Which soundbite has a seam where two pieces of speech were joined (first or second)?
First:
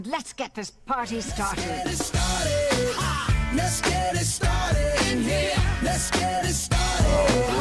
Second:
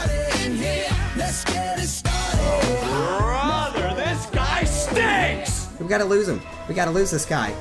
second